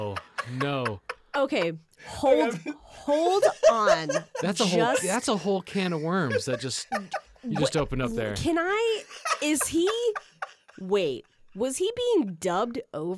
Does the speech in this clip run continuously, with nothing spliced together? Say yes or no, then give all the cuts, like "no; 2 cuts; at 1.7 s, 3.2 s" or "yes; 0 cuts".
yes; 0 cuts